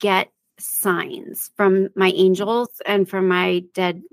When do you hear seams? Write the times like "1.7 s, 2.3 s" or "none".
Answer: none